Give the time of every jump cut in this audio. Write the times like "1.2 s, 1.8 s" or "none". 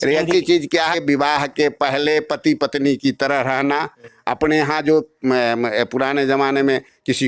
0.9 s